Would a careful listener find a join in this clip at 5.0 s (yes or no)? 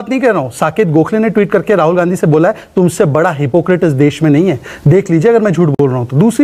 no